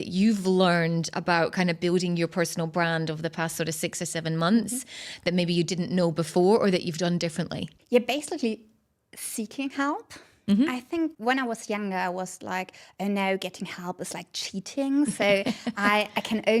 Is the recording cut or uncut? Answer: uncut